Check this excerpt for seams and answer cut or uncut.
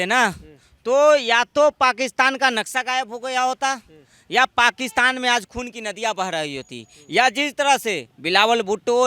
uncut